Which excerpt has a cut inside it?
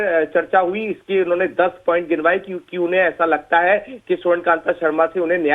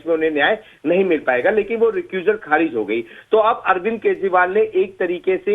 second; 1 cut; at 3.1 s

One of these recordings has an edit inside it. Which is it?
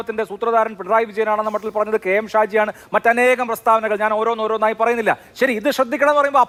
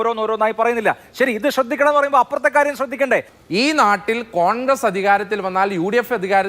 second; 1 cut; at 3.3 s

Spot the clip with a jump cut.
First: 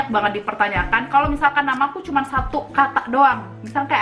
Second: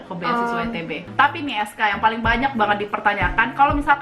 second; 1 cut; at 1.0 s

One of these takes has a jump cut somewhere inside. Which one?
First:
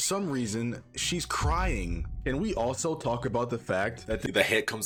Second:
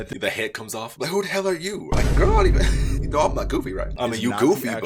second; 1 cut; at 3.9 s

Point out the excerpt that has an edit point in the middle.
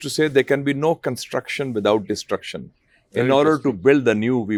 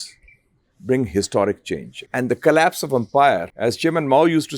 second; 2 cuts; at 1.9 s, 3.5 s

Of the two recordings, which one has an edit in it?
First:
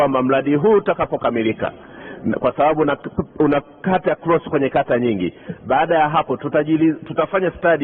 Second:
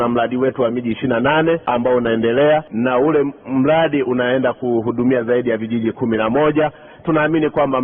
second; 2 cuts; at 1.6 s, 2.7 s

